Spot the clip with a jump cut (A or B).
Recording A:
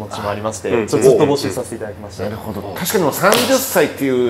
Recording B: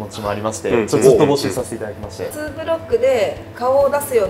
B